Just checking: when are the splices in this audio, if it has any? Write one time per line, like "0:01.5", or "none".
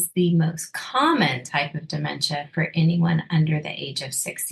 none